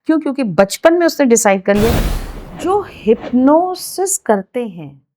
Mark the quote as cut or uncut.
cut